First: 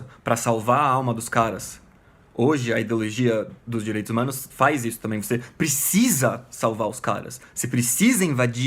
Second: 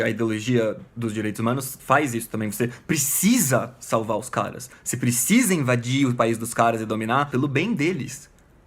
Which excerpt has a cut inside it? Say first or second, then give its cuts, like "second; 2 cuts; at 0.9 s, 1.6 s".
second; 1 cut; at 7.3 s